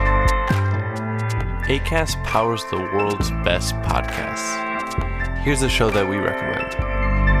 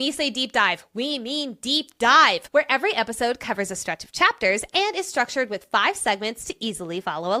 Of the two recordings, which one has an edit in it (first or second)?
first